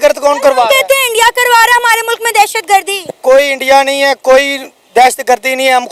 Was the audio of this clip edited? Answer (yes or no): no